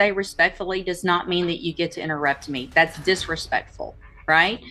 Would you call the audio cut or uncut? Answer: uncut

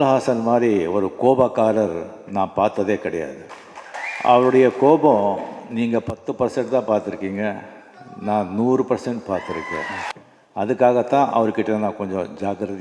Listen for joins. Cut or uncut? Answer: cut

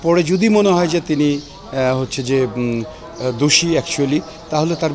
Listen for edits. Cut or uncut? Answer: uncut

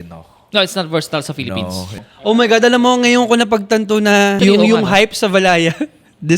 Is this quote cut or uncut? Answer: cut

